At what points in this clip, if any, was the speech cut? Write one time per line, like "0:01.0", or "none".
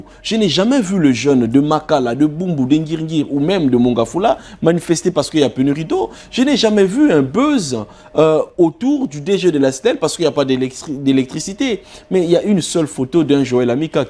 none